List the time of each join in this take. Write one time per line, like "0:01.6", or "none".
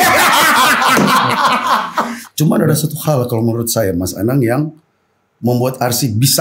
0:02.2